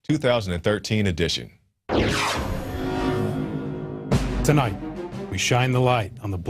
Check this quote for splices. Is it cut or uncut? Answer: cut